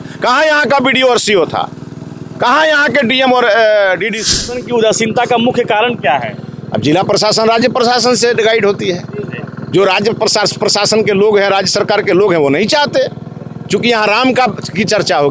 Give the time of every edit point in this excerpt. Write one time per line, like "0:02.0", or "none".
0:04.5